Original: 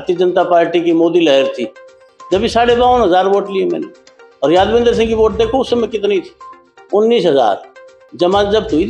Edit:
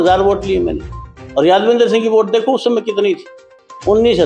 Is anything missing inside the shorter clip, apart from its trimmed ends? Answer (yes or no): no